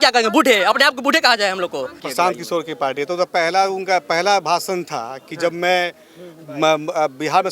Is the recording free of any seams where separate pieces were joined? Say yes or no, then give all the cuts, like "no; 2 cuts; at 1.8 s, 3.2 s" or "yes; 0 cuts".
no; 1 cut; at 2.0 s